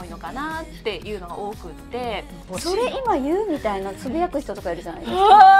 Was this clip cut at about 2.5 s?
yes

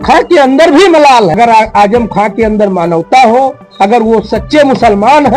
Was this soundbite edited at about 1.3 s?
yes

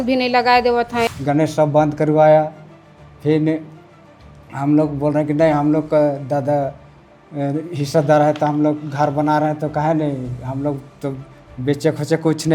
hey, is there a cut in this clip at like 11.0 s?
no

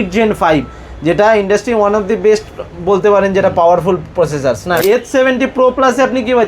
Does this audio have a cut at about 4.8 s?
yes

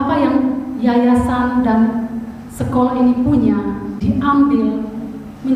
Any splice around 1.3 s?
no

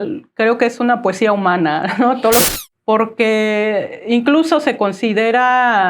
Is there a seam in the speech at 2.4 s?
yes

